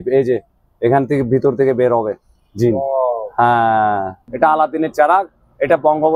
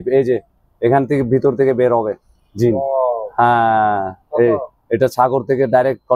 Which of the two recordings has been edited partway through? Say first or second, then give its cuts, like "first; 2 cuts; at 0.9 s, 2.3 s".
first; 1 cut; at 4.2 s